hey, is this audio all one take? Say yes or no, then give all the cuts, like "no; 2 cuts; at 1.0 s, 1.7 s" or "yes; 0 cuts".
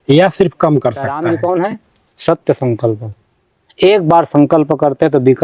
no; 1 cut; at 1.1 s